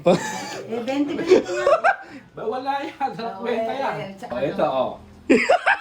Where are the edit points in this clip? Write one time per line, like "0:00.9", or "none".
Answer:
0:04.3